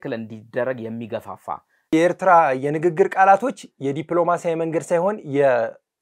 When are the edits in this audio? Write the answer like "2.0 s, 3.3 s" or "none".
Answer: 1.9 s